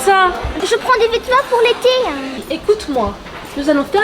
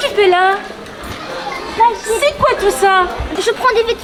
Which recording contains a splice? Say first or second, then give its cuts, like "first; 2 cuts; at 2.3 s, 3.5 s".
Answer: first; 1 cut; at 2.3 s